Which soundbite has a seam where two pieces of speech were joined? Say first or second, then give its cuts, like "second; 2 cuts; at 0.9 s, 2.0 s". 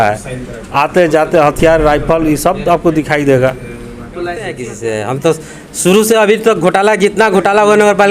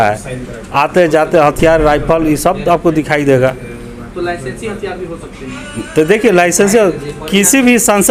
first; 1 cut; at 4.7 s